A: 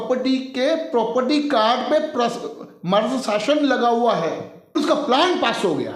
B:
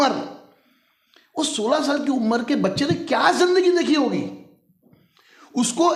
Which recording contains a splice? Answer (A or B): A